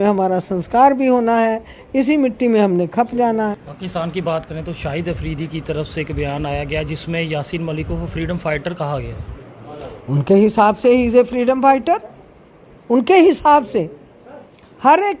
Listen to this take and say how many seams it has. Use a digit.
1